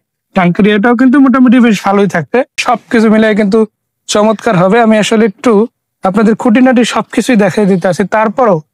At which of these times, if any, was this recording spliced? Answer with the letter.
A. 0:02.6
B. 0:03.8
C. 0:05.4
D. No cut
A